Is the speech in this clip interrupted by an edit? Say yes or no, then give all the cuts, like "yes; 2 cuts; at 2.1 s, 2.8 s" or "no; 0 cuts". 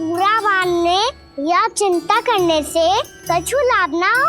yes; 2 cuts; at 1.3 s, 3.1 s